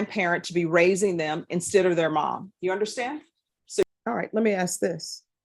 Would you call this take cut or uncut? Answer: cut